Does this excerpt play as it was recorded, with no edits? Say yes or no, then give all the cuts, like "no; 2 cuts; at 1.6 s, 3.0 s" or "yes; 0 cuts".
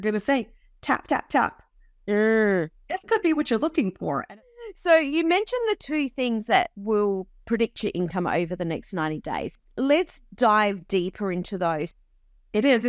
no; 3 cuts; at 4.2 s, 9.5 s, 11.9 s